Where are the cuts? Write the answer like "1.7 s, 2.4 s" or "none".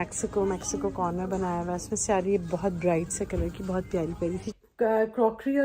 4.5 s